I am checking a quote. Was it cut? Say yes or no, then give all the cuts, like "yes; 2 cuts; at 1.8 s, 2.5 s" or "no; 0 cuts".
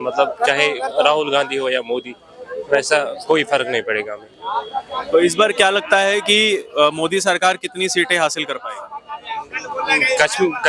no; 0 cuts